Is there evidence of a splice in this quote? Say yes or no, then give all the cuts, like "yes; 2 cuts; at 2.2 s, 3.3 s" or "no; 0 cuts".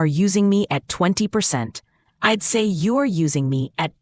no; 0 cuts